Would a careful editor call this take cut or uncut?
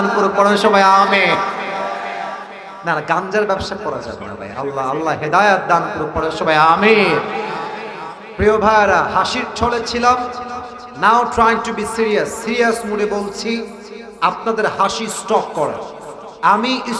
uncut